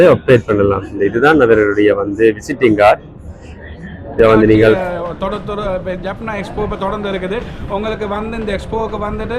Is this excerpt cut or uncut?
cut